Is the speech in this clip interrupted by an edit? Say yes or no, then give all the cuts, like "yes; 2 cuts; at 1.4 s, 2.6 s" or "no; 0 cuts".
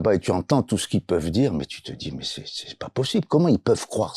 no; 0 cuts